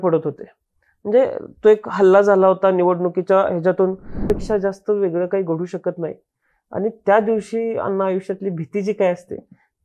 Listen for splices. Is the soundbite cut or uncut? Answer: cut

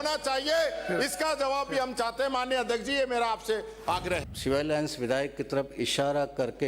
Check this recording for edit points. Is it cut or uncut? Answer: cut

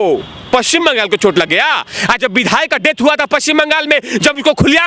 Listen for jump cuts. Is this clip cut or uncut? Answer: uncut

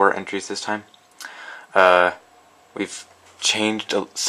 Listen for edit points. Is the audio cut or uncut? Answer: uncut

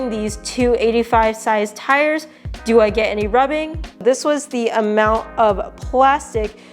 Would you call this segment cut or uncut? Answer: cut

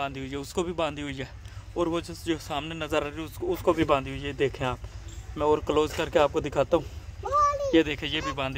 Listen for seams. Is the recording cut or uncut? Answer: uncut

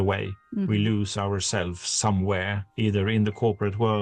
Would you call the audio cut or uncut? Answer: cut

